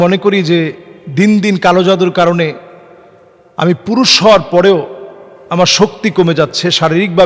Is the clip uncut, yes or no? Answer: yes